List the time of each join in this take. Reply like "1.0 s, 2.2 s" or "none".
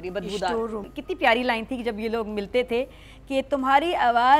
0.9 s

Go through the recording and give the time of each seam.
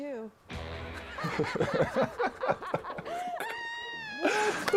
1.2 s

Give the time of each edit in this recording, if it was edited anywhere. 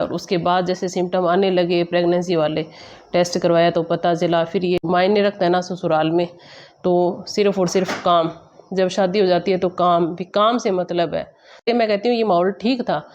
4.8 s, 11.7 s

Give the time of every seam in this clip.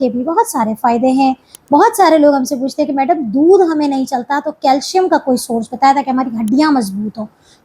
1.5 s

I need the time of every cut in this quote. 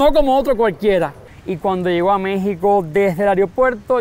1.2 s

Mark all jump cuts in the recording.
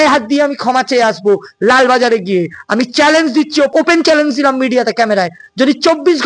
3.7 s

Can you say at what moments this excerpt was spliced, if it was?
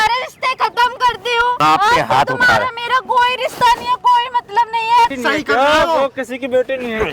1.6 s, 5.1 s

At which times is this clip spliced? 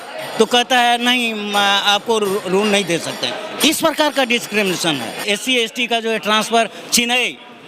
5.2 s

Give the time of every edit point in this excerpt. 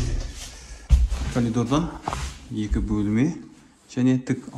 none

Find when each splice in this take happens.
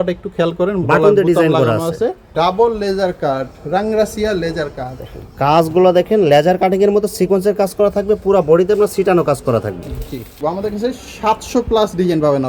2.3 s, 10.4 s

